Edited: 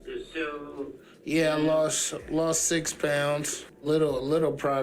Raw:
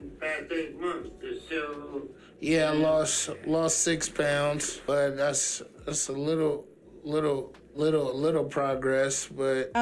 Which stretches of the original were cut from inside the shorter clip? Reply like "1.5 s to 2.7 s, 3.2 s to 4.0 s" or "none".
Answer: 4.7 s to 7.5 s